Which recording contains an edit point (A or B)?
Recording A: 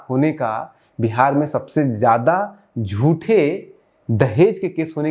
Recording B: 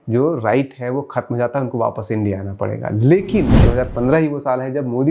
B